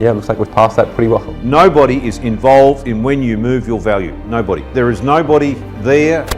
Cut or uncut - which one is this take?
cut